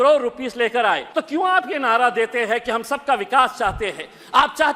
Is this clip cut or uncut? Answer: cut